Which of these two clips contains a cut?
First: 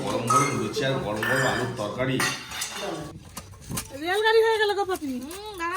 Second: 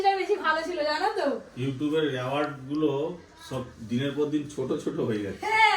first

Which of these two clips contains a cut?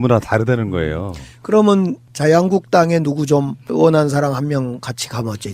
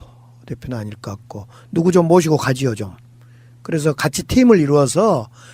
second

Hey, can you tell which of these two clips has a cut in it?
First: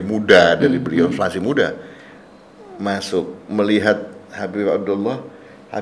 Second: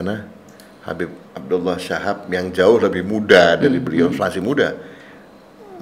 second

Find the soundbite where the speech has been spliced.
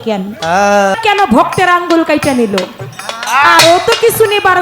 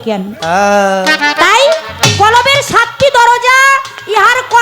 first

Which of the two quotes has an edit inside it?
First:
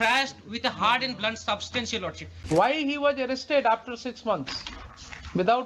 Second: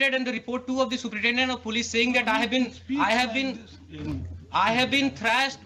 first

